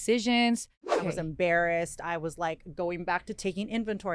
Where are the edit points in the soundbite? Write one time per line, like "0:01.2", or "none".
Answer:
0:01.0

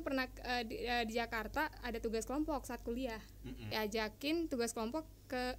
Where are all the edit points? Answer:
0:03.7

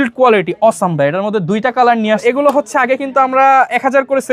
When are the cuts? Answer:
0:02.2

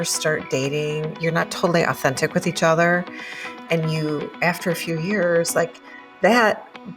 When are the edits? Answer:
0:01.1

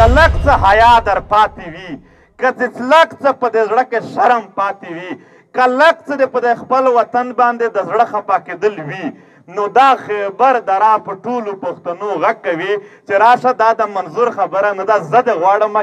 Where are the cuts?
none

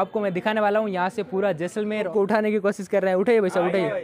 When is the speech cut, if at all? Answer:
0:02.1

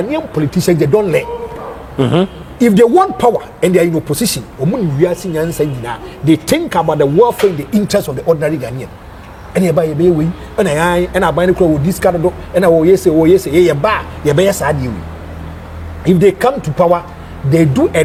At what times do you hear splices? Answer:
none

